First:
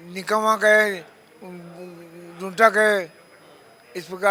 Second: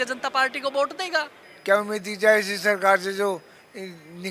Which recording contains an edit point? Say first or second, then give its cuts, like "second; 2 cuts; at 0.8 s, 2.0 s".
second; 1 cut; at 1.4 s